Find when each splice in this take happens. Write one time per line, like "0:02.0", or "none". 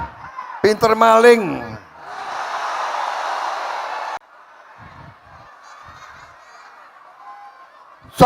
0:04.2